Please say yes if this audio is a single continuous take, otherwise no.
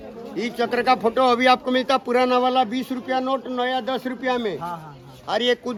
yes